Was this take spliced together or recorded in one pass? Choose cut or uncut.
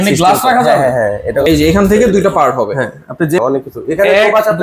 cut